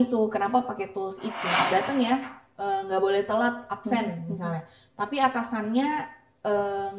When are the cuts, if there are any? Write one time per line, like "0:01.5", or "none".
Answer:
0:01.7